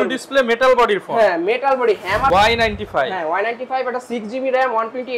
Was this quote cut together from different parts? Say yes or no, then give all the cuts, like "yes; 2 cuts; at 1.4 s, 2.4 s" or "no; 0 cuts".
yes; 1 cut; at 2.3 s